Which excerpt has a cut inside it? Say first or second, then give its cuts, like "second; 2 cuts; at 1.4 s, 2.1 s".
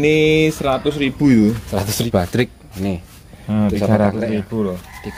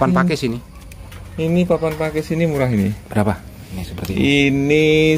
first; 1 cut; at 2.0 s